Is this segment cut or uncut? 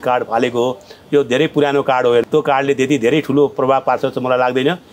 cut